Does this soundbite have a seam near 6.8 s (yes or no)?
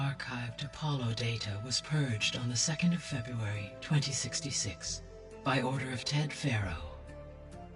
yes